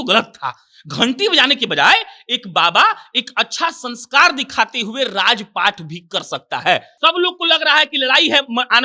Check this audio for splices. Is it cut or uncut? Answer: cut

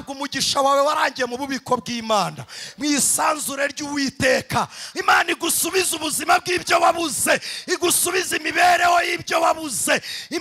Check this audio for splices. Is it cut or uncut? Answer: cut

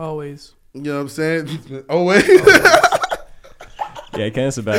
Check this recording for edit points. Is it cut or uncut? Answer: uncut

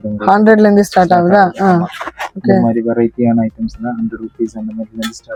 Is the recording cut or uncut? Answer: uncut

